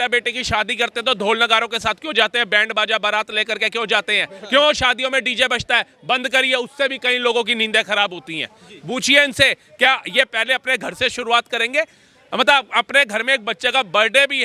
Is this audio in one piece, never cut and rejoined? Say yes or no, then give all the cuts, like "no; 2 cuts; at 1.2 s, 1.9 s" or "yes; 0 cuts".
yes; 0 cuts